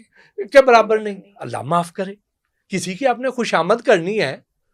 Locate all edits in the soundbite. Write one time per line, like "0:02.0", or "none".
none